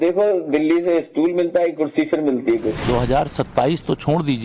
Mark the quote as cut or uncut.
cut